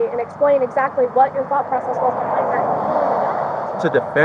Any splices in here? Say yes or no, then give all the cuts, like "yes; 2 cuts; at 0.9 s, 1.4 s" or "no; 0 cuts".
no; 0 cuts